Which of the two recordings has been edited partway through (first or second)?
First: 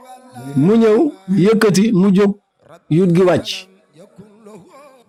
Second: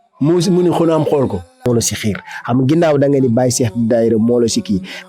second